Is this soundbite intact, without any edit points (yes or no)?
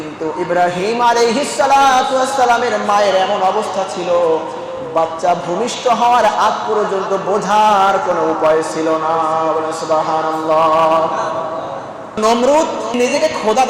no